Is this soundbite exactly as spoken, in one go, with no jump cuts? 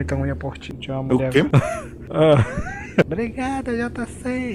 no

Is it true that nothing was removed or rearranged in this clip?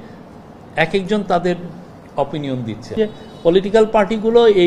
no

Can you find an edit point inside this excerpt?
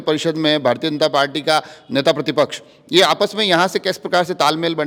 no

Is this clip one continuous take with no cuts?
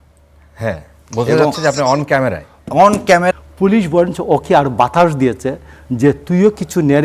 no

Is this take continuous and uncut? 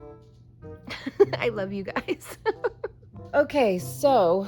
no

